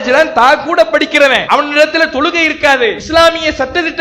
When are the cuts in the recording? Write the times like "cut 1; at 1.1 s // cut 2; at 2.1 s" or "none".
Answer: cut 1; at 1.4 s // cut 2; at 3.0 s